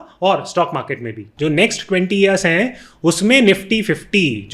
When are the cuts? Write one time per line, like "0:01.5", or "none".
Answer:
0:01.3